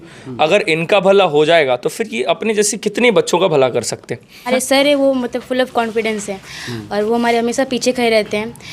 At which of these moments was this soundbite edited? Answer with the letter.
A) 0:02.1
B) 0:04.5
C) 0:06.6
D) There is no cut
B